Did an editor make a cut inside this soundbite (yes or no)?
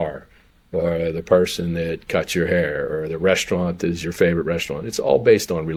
no